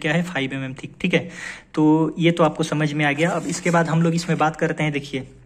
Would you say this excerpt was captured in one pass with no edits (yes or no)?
yes